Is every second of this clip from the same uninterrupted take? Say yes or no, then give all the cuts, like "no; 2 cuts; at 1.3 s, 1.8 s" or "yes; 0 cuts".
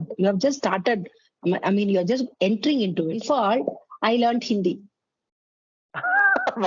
no; 1 cut; at 3.2 s